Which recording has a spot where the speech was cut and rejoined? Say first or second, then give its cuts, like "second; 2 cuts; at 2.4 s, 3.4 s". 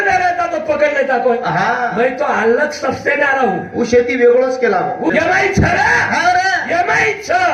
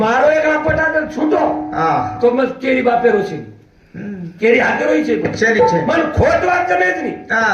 first; 1 cut; at 5.1 s